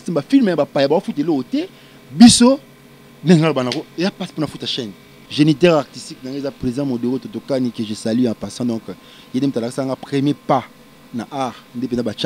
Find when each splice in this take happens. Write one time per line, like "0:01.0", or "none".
0:05.2